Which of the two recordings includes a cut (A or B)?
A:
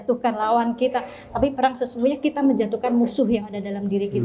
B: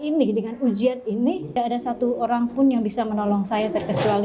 B